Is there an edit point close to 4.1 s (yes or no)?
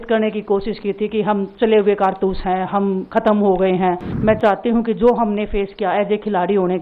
yes